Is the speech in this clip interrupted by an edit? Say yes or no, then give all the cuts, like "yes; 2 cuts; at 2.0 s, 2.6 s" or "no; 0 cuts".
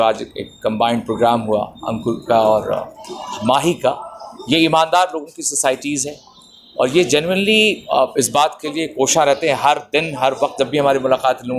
no; 0 cuts